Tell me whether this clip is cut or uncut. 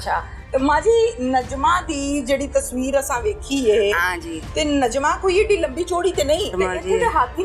cut